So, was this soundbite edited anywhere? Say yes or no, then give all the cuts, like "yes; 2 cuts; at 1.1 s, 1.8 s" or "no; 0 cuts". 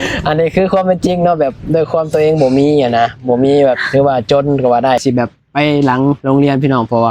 yes; 1 cut; at 5.0 s